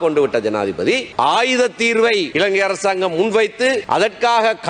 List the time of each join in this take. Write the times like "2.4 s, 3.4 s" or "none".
1.1 s, 2.3 s, 3.8 s